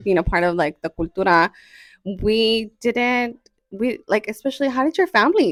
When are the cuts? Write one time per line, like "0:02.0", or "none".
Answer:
none